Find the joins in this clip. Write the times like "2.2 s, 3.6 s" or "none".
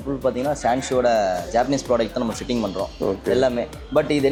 none